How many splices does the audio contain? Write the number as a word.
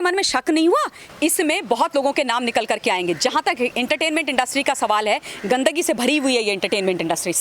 one